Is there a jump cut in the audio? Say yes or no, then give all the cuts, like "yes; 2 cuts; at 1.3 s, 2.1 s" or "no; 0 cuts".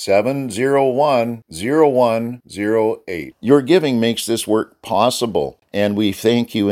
yes; 1 cut; at 5.6 s